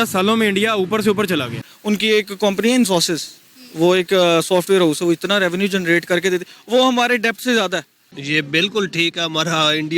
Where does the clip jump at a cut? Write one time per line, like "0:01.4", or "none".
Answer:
0:01.7
0:08.0